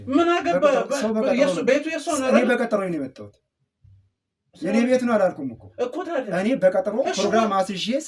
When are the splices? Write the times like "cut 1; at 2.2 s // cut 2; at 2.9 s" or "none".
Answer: none